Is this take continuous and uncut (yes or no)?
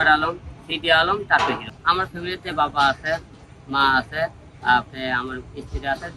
no